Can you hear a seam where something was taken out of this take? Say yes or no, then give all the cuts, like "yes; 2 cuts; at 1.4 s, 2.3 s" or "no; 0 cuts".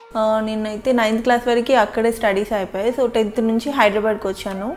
no; 0 cuts